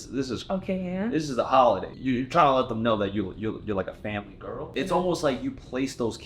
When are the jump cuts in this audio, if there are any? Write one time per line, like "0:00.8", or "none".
0:01.9
0:04.7